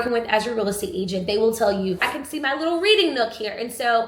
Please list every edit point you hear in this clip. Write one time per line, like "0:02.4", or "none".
0:02.1